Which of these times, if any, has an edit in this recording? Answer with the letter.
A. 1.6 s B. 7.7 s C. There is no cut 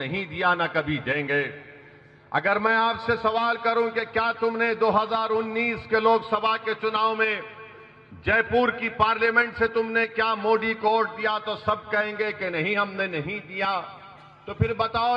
C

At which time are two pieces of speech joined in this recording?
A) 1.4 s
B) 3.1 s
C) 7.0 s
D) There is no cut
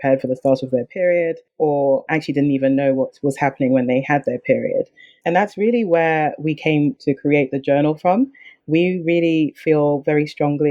A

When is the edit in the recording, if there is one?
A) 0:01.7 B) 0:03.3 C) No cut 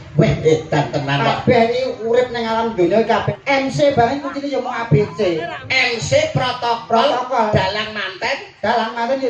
B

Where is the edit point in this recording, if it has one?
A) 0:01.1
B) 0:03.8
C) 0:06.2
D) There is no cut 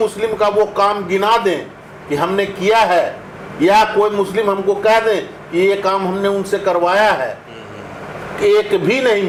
D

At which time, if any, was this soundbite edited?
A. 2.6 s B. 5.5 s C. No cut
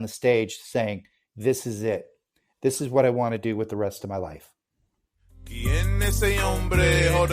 B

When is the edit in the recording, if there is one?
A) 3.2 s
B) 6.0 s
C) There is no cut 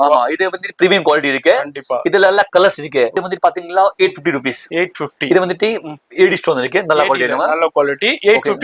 A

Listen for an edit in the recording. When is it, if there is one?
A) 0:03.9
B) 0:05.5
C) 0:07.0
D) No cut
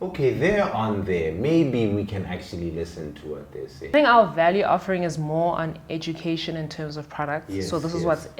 A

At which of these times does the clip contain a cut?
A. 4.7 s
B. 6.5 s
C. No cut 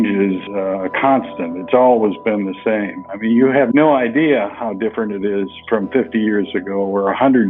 C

